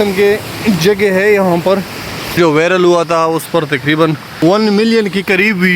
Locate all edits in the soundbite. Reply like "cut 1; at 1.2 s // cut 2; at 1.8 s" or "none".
cut 1; at 2.4 s // cut 2; at 4.3 s